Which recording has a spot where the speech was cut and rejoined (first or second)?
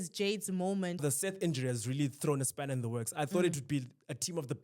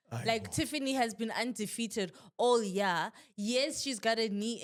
first